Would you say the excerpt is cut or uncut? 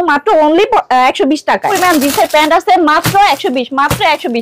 cut